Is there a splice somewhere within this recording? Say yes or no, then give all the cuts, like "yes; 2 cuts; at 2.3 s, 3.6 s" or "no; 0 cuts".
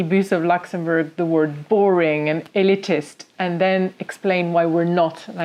no; 0 cuts